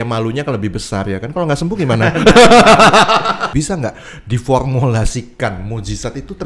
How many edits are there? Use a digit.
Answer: 1